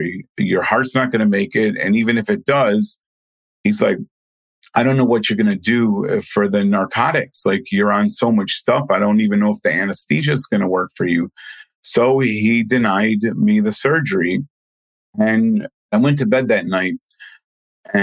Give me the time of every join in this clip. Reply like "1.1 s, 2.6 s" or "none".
15.9 s